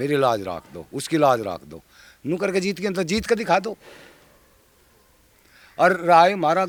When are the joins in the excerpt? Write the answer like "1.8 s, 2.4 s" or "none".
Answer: none